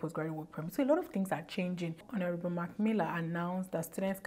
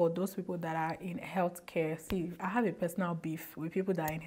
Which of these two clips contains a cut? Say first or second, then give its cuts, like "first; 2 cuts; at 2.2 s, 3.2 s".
first; 1 cut; at 2.0 s